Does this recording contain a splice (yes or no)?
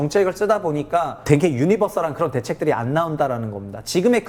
yes